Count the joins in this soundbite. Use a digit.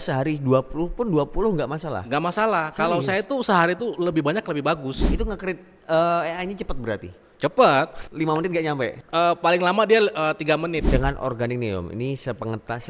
2